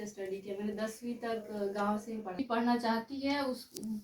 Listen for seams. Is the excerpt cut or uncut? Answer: cut